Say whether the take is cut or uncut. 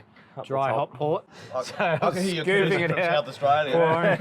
cut